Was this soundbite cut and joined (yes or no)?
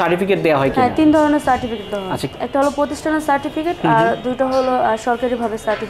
no